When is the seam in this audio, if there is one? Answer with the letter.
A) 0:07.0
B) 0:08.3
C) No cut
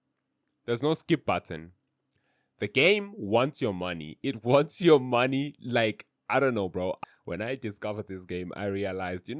A